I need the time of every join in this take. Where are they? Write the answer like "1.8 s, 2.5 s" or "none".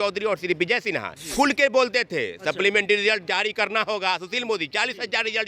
1.2 s